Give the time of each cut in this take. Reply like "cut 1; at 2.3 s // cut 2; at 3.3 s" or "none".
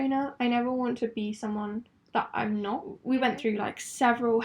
cut 1; at 2.9 s